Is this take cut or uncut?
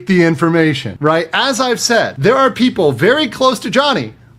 cut